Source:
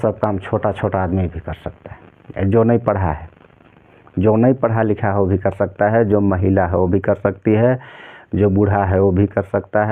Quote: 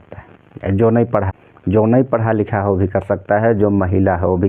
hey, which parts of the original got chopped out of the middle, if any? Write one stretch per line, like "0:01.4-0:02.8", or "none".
0:03.2-0:03.9